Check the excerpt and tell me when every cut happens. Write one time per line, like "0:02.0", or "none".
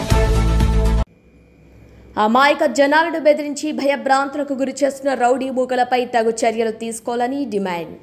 0:01.1